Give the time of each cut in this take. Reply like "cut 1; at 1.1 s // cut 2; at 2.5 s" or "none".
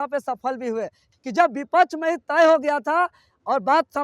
cut 1; at 1.1 s